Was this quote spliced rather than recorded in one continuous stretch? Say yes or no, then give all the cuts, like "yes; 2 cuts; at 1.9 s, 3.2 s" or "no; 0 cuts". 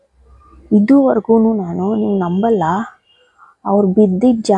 no; 0 cuts